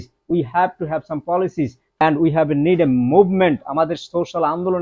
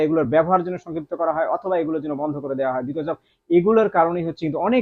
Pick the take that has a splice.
first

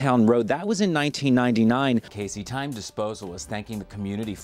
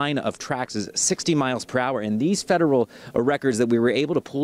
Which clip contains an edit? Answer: first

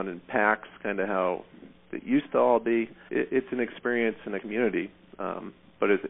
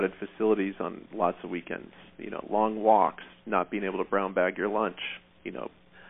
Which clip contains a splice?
first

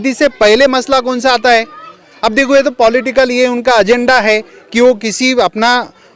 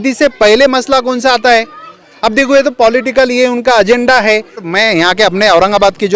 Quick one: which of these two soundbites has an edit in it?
second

